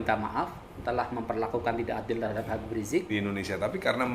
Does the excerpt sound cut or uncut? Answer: cut